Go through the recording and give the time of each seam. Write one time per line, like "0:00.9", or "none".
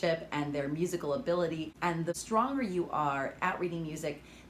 0:02.1